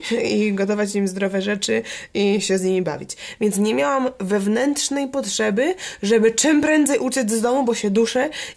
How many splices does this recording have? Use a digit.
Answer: 0